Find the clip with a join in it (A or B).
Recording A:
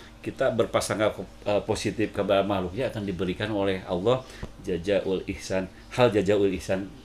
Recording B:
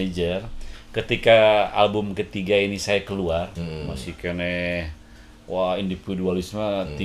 B